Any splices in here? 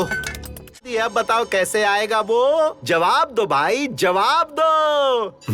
yes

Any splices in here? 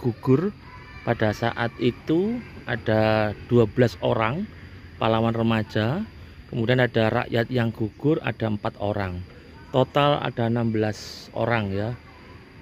no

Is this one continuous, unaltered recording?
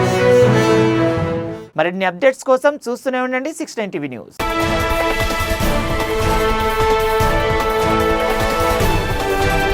yes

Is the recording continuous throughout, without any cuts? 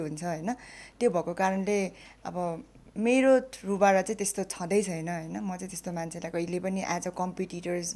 yes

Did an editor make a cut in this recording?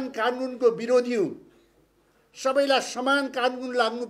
no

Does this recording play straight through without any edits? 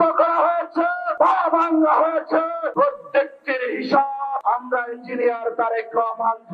no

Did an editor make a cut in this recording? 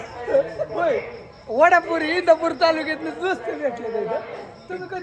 no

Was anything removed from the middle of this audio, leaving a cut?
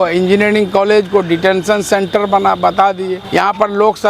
yes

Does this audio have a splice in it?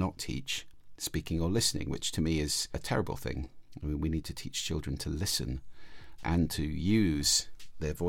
yes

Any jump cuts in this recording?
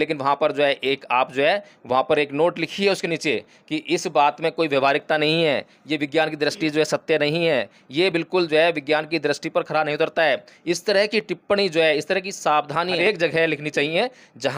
no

